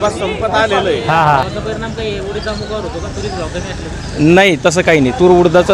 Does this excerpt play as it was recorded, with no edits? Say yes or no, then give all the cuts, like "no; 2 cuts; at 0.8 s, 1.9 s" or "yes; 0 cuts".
no; 1 cut; at 1.4 s